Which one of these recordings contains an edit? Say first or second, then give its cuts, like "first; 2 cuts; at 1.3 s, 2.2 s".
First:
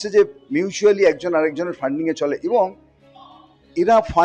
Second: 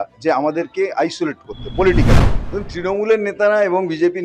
second; 1 cut; at 2.3 s